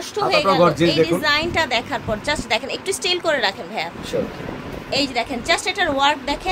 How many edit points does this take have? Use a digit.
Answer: 0